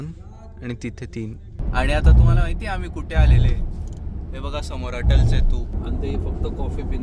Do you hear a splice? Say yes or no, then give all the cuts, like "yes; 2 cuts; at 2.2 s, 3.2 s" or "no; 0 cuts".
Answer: yes; 2 cuts; at 1.6 s, 5.7 s